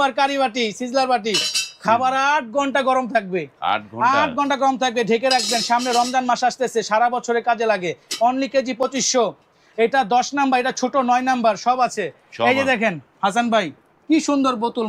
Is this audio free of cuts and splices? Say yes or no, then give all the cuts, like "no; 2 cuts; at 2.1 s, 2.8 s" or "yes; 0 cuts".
yes; 0 cuts